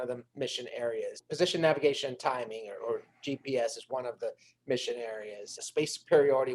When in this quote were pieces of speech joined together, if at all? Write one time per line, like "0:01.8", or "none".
0:01.2
0:05.6